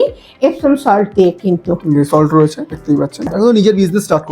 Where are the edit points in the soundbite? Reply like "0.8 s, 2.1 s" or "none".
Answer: 3.2 s